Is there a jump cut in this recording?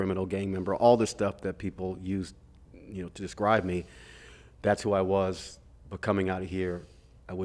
no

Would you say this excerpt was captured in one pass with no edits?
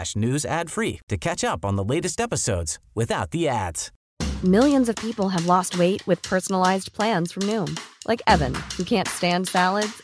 no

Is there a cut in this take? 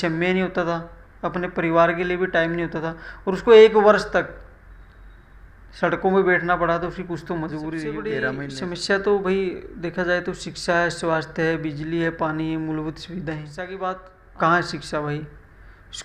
yes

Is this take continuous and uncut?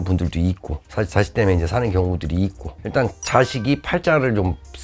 no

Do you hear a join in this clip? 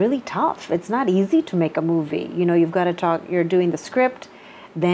no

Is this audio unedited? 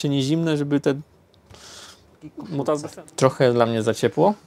no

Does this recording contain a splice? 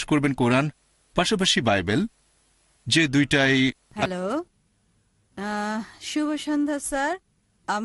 yes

